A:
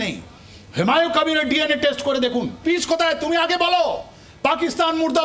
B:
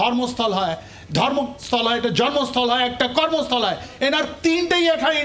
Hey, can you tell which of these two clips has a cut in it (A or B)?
A